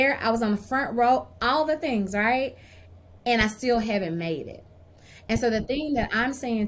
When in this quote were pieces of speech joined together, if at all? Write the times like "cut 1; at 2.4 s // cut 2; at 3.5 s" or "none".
none